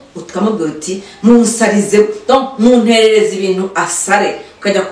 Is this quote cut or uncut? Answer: uncut